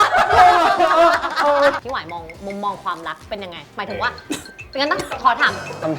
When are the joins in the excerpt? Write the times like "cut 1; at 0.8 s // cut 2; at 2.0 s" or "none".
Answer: cut 1; at 1.8 s